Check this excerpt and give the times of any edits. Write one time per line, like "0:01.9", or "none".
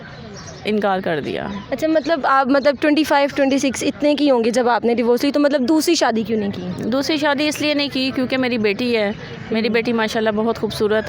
none

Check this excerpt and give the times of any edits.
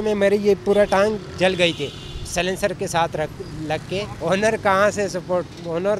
none

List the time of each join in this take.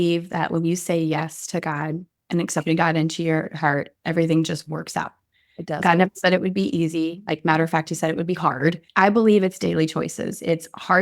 0:08.8

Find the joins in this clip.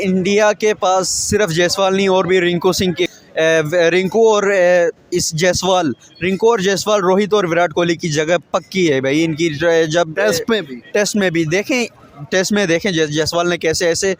0:03.1

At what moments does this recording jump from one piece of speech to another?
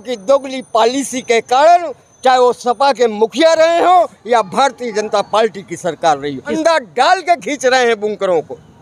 0:06.5

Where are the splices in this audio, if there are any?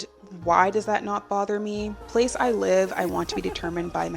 0:02.1

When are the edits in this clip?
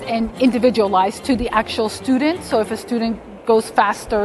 none

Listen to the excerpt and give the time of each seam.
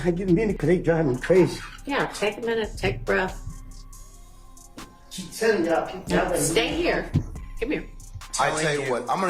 0:08.2

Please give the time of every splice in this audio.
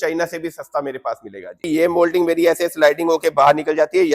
0:01.7

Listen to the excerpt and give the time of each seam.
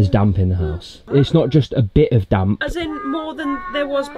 0:01.1

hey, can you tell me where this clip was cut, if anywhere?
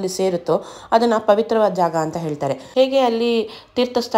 0:02.6

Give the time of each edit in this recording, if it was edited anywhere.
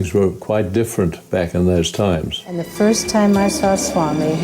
0:02.7

